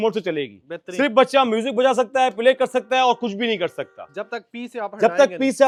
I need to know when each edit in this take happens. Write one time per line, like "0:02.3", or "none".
none